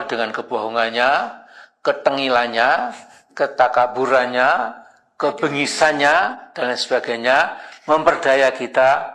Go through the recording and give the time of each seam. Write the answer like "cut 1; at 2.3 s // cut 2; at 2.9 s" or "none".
none

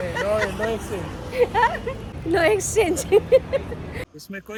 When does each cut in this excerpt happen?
none

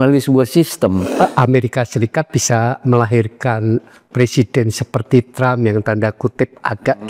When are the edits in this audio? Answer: cut 1; at 1.1 s

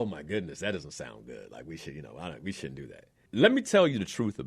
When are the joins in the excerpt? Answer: cut 1; at 3.1 s

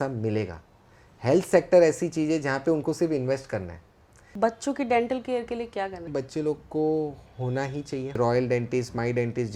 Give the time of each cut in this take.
cut 1; at 4.3 s // cut 2; at 6.1 s // cut 3; at 8.2 s

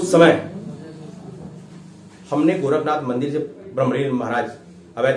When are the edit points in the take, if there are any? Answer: none

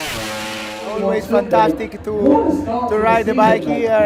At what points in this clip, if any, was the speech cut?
cut 1; at 0.9 s

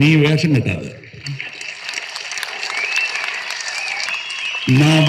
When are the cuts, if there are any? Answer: cut 1; at 4.0 s

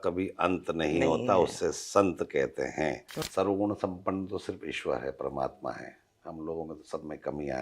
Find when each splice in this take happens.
cut 1; at 3.1 s

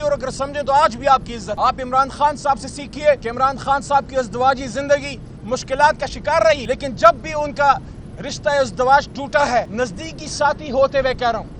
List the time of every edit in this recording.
cut 1; at 1.4 s // cut 2; at 3.3 s // cut 3; at 6.6 s // cut 4; at 9.7 s

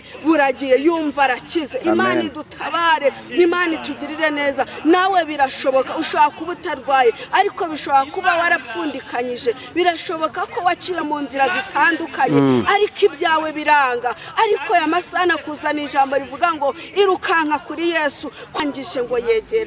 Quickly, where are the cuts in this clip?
cut 1; at 18.6 s

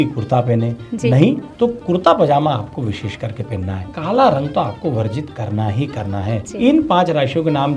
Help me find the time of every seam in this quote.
cut 1; at 3.9 s // cut 2; at 6.5 s

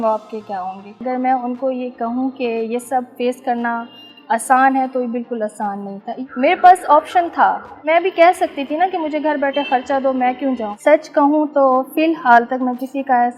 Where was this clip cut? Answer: cut 1; at 1.0 s // cut 2; at 6.1 s // cut 3; at 7.7 s // cut 4; at 10.7 s

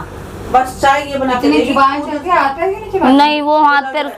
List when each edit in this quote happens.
none

